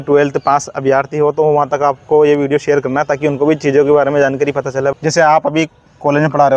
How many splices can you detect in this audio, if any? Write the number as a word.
one